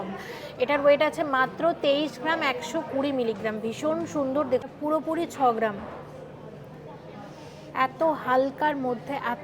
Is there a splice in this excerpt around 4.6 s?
yes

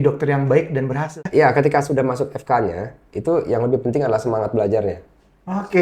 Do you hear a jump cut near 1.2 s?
yes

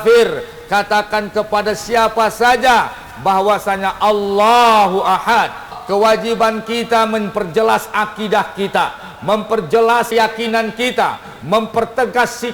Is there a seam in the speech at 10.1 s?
yes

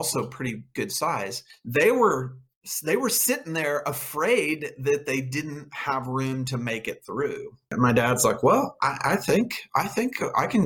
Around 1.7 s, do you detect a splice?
no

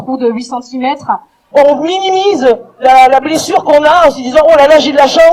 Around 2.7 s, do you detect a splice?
no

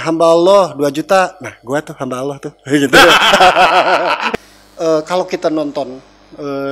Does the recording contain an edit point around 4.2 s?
yes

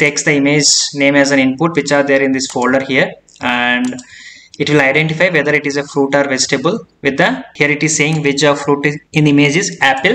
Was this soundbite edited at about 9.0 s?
yes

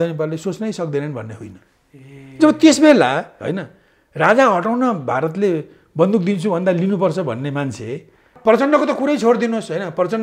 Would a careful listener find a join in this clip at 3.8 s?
no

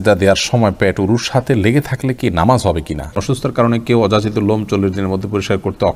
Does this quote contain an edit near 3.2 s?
yes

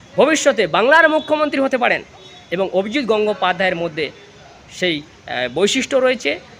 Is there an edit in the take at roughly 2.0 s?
no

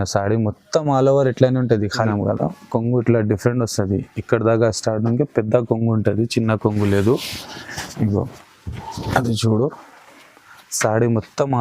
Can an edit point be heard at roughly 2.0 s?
yes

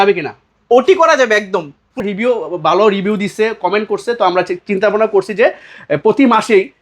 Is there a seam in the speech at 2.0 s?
yes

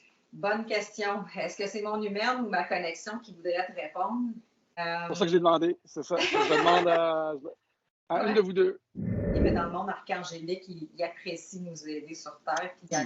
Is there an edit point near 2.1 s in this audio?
no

